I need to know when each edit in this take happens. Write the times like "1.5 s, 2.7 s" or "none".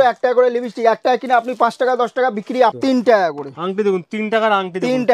2.8 s